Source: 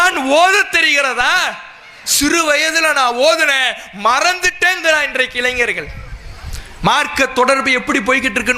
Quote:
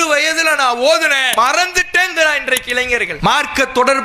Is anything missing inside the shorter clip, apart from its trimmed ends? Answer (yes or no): yes